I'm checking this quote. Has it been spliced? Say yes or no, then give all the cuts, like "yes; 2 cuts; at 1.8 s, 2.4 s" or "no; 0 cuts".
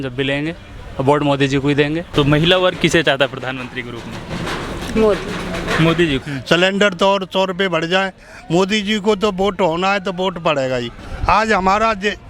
yes; 3 cuts; at 2.1 s, 6.2 s, 11.0 s